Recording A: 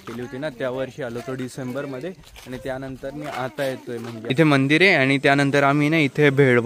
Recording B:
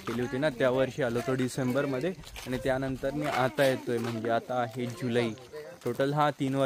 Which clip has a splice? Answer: A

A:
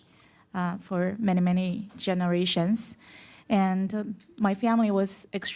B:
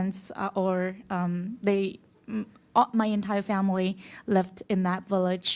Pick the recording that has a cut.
B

